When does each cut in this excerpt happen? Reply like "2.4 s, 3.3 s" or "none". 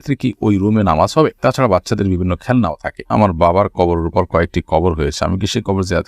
3.1 s